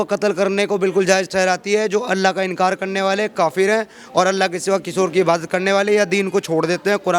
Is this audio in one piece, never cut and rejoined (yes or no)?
yes